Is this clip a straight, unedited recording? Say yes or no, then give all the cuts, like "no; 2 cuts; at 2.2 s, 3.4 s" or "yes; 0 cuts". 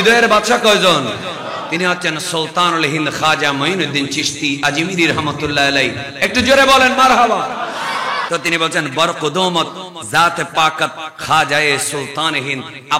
no; 1 cut; at 8.2 s